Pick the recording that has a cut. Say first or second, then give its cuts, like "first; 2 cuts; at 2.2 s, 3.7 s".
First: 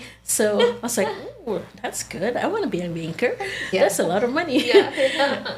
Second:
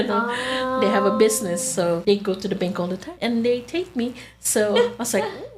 second; 2 cuts; at 2.0 s, 3.1 s